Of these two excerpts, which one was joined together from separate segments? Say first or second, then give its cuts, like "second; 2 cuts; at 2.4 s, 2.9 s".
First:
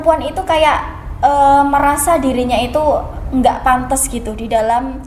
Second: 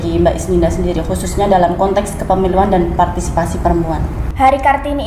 second; 1 cut; at 4.1 s